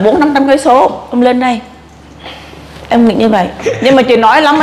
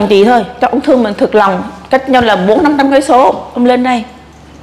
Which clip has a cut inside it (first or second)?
first